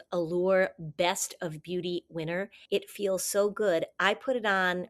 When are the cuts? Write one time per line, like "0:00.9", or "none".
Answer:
none